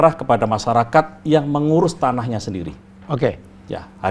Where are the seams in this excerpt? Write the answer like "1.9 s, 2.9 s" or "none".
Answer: none